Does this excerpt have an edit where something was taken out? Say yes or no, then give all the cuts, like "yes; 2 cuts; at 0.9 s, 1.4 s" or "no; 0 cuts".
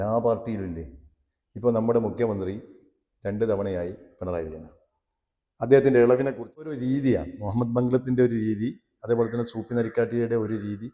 yes; 1 cut; at 6.7 s